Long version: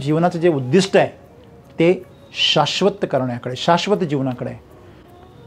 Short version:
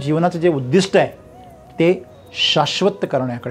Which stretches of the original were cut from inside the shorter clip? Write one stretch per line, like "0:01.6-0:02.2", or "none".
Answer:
none